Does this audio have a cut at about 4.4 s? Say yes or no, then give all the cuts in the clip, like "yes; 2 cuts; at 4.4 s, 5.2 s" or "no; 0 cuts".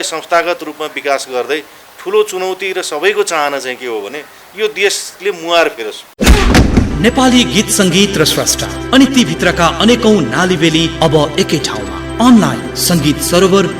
no; 1 cut; at 6.0 s